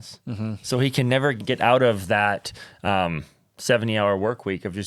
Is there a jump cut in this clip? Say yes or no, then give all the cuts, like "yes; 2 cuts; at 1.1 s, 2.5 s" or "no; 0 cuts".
yes; 1 cut; at 1.4 s